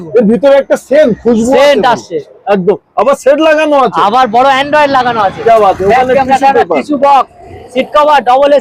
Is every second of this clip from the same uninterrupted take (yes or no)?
yes